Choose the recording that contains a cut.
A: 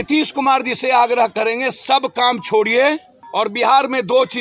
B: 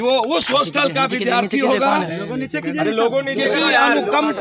A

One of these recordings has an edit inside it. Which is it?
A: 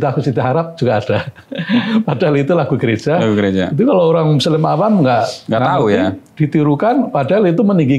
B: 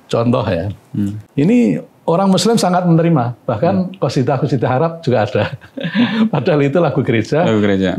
B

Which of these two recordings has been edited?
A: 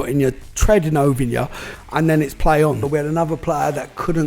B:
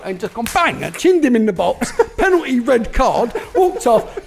A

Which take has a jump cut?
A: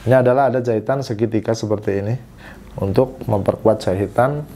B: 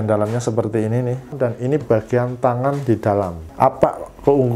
B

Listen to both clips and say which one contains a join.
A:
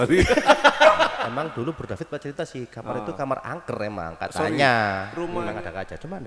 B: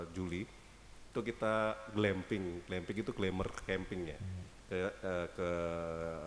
A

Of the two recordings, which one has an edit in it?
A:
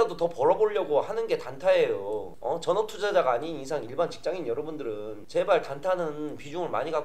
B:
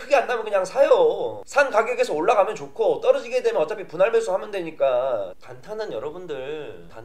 A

